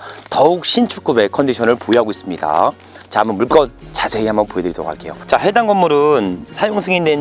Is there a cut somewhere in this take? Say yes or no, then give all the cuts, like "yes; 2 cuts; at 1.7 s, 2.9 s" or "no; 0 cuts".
yes; 1 cut; at 5.2 s